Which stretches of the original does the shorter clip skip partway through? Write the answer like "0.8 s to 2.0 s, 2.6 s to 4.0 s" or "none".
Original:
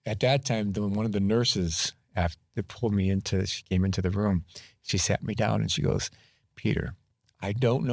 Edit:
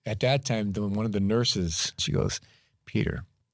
2.0 s to 5.7 s

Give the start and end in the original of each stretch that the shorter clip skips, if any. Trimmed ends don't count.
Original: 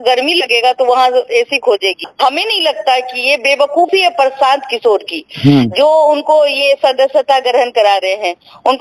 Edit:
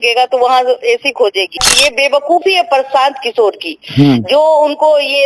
2.1 s to 3.1 s

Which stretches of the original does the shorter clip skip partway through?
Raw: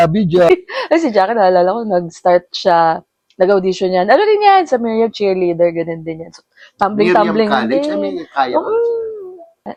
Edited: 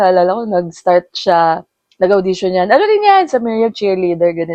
none

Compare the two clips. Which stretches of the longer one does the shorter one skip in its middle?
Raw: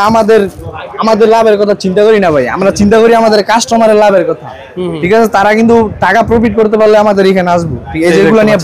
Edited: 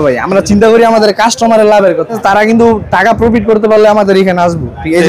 4.5 s to 5.3 s

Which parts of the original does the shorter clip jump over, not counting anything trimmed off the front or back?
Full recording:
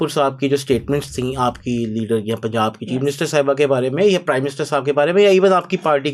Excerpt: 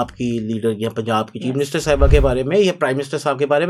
none

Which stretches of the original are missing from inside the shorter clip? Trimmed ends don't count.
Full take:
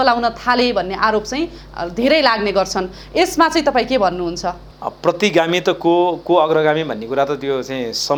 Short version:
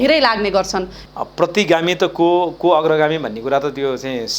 3.0 s to 4.6 s

